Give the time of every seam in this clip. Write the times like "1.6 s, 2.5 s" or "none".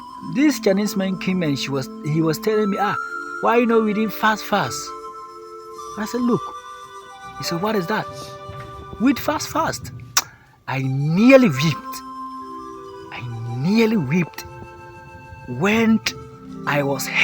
12.0 s, 13.4 s